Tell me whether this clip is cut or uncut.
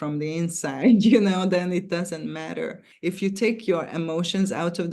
cut